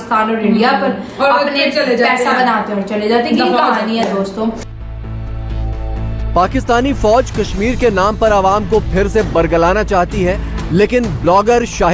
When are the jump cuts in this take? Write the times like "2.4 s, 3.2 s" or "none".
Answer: none